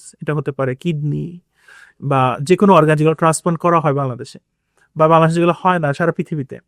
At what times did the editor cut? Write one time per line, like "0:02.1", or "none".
none